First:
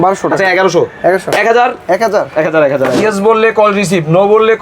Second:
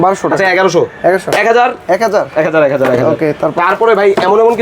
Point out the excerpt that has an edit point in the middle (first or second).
first